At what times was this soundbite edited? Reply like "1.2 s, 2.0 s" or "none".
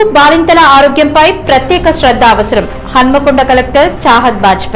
none